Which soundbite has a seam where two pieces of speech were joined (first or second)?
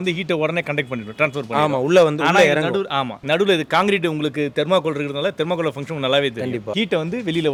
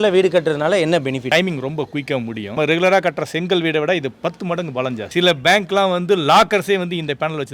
second